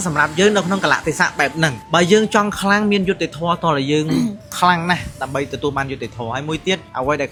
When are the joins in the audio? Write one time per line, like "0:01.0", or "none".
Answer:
none